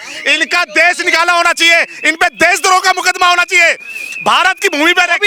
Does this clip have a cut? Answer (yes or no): no